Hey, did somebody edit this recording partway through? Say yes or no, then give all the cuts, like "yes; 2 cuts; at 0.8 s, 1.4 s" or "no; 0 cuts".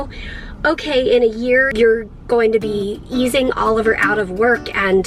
yes; 1 cut; at 1.7 s